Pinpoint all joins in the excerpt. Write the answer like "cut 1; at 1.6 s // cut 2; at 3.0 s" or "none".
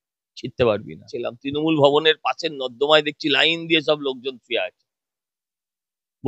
cut 1; at 1.4 s